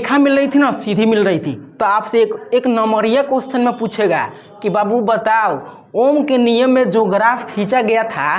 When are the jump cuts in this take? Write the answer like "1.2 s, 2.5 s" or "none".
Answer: none